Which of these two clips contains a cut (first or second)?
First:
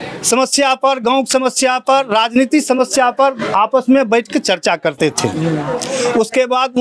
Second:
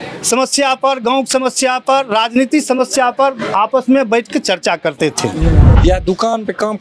second